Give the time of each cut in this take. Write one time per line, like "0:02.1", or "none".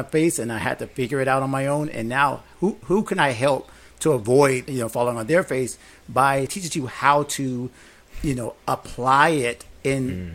0:04.7
0:06.5